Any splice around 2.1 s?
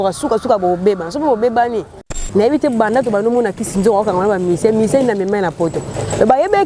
yes; 1 cut; at 2.1 s

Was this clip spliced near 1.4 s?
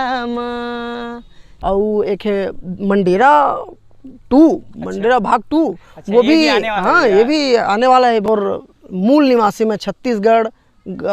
yes; 2 cuts; at 1.4 s, 8.2 s

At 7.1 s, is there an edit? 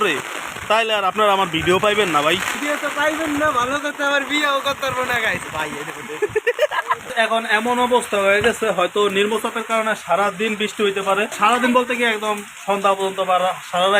yes; 3 cuts; at 2.5 s, 7.1 s, 11.3 s

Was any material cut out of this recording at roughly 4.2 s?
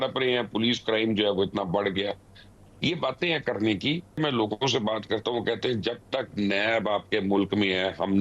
yes; 1 cut; at 4.2 s

